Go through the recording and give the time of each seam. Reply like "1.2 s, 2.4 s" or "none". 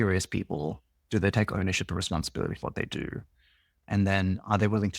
none